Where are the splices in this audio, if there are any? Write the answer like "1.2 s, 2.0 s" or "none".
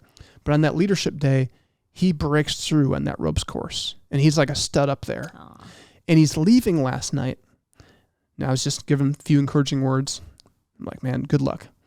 none